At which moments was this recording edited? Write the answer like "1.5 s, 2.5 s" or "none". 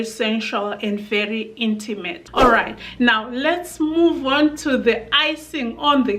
2.3 s